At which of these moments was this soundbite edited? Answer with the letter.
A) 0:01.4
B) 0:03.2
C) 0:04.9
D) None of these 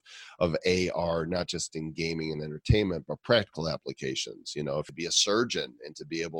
C